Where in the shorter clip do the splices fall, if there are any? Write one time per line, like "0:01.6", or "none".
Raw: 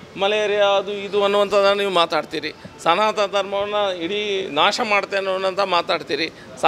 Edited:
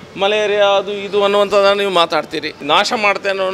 0:02.6